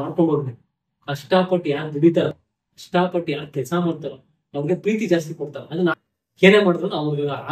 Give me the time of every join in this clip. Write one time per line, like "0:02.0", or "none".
0:05.9